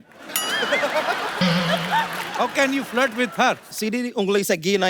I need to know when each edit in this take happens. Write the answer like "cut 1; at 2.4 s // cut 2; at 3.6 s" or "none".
cut 1; at 3.7 s